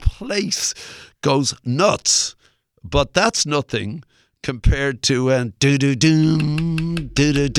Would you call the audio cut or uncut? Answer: uncut